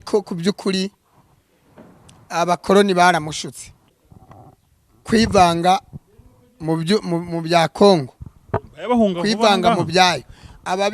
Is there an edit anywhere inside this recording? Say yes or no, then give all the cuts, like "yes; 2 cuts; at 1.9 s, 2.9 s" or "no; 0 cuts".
yes; 1 cut; at 3.7 s